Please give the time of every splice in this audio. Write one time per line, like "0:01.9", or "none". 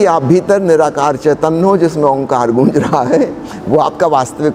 none

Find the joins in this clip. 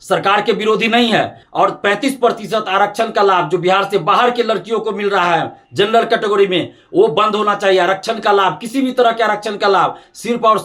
0:01.4

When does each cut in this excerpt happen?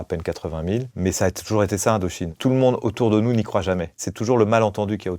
0:02.3
0:04.0

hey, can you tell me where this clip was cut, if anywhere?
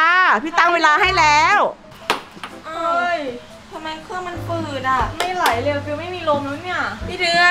0:01.8

